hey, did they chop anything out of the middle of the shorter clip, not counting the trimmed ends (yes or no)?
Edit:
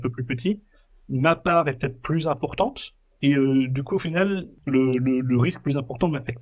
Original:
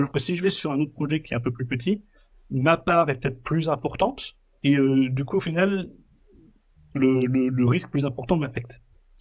yes